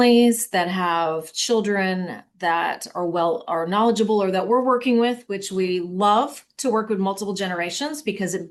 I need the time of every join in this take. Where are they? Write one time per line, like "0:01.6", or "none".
none

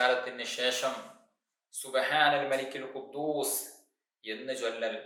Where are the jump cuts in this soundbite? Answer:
none

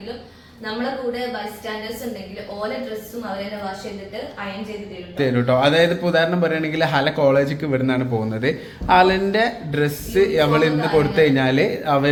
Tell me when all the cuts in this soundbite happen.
none

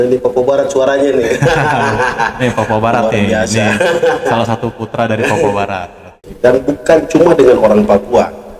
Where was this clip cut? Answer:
0:06.2

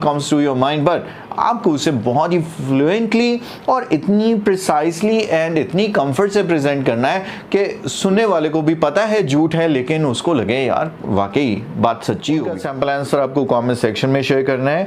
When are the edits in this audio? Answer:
0:12.6

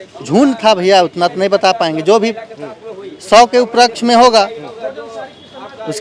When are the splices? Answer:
none

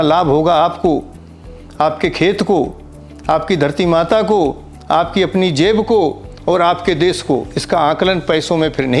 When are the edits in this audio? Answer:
none

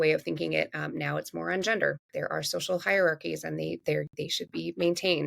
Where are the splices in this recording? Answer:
0:02.0

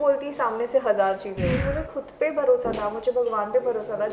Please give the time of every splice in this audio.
0:01.6

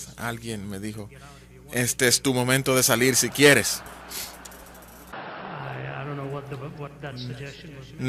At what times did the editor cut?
none

